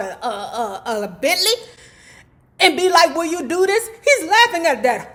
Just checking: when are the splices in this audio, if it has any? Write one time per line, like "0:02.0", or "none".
none